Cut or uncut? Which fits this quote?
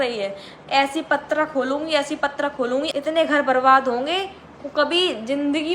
cut